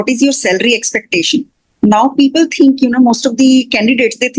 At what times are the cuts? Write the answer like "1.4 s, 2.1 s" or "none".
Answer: none